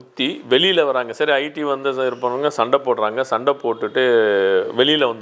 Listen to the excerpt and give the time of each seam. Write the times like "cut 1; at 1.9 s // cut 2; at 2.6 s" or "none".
none